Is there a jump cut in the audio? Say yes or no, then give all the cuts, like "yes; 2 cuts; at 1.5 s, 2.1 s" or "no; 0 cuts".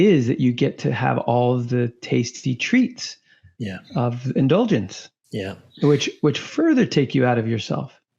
no; 0 cuts